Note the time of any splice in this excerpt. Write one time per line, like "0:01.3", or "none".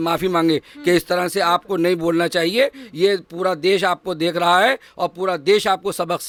none